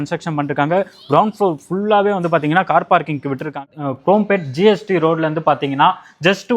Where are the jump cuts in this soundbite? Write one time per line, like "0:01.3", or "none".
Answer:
0:03.7